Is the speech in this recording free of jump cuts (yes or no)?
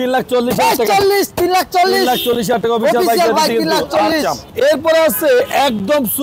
yes